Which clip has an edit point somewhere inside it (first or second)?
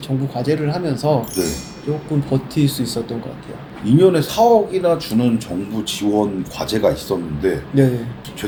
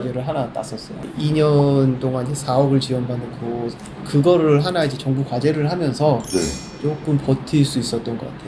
second